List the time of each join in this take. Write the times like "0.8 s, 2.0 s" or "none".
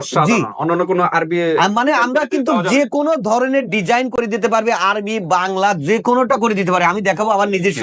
none